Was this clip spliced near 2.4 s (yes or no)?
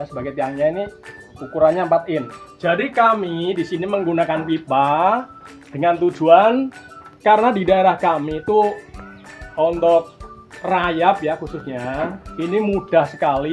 yes